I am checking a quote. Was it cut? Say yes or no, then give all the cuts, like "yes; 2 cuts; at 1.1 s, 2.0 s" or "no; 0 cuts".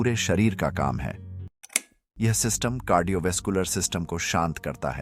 yes; 1 cut; at 1.6 s